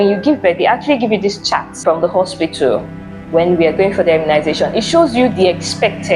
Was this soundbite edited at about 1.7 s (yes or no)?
yes